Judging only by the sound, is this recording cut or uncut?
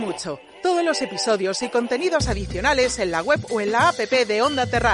uncut